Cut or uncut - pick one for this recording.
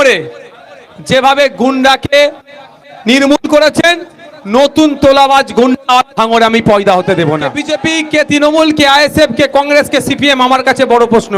cut